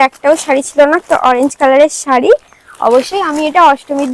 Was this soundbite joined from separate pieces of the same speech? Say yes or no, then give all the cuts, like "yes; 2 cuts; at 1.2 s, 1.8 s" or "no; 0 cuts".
no; 0 cuts